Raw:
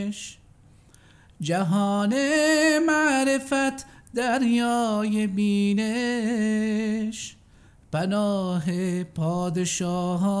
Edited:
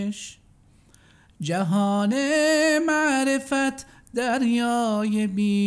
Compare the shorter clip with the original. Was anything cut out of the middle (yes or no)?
no